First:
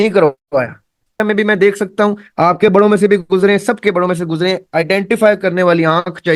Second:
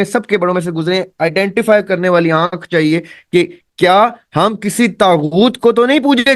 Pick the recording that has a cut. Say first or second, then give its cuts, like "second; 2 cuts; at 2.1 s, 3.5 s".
first; 1 cut; at 1.2 s